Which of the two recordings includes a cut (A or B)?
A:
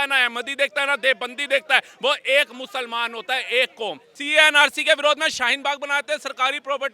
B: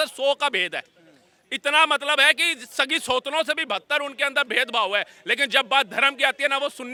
A